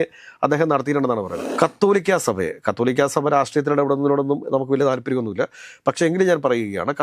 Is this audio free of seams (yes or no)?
no